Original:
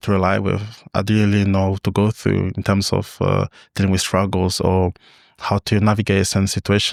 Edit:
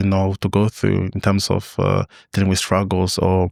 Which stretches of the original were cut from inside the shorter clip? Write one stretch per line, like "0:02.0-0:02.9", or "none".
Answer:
none